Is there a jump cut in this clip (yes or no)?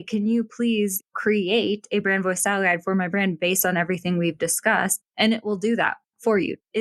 no